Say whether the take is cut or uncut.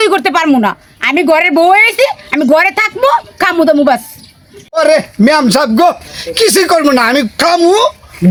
uncut